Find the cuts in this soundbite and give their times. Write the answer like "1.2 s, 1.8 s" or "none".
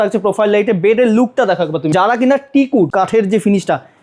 1.9 s, 2.9 s